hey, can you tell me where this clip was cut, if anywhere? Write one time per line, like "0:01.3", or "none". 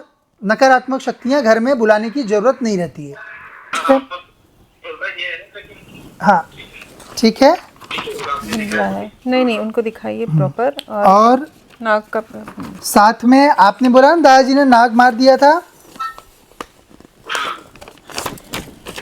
0:03.7